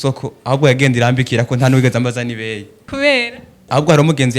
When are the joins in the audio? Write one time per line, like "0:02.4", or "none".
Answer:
0:02.8
0:03.6

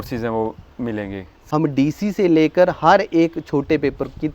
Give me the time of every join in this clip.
0:01.3

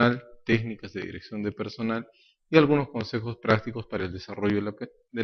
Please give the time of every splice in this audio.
0:03.5

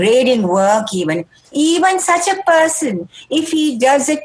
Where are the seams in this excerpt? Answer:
none

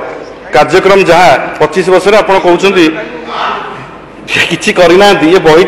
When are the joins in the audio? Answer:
none

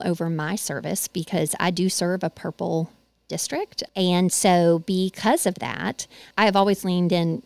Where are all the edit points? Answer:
0:03.8
0:06.3

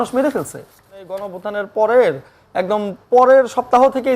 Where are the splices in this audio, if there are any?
0:01.3

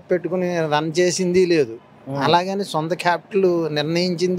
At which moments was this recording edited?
none

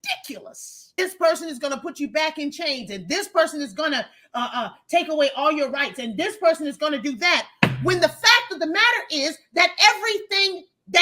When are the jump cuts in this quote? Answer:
0:01.0

